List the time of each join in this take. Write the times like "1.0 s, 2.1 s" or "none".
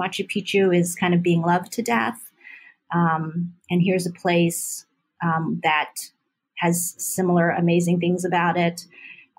none